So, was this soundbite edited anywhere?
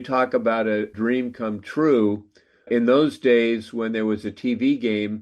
yes; 2 cuts; at 0.9 s, 2.7 s

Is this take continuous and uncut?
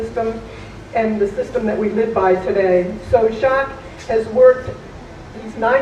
no; 1 cut; at 3.0 s

